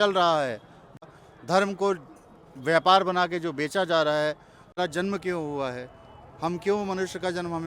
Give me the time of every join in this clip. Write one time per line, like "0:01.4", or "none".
0:01.1
0:04.8